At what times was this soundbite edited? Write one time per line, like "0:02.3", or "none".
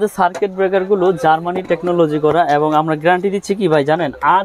none